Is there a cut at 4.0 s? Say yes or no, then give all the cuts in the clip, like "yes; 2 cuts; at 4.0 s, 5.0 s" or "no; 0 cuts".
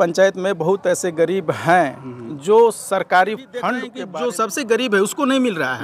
yes; 1 cut; at 4.0 s